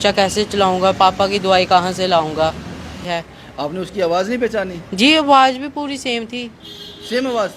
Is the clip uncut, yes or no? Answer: no